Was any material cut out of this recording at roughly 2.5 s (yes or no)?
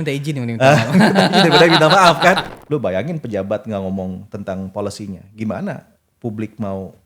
yes